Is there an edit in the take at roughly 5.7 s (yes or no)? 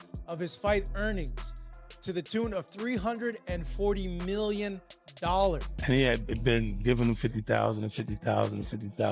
yes